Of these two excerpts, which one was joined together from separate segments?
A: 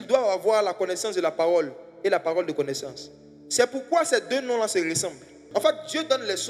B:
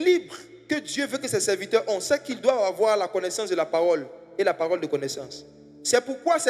A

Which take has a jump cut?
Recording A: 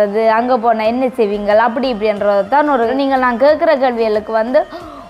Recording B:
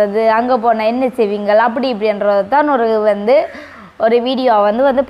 A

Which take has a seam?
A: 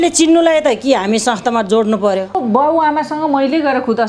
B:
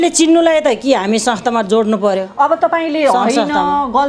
A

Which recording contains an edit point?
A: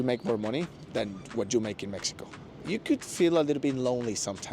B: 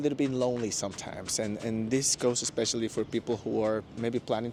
A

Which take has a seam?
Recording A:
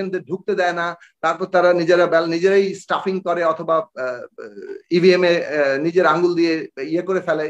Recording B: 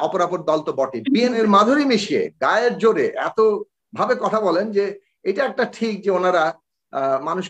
B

